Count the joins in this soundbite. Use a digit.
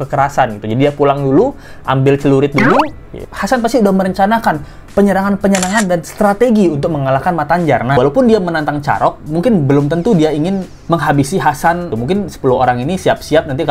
4